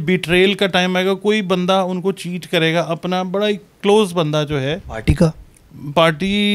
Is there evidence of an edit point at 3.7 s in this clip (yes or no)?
no